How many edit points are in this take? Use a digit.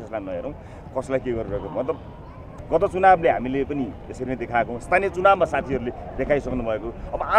1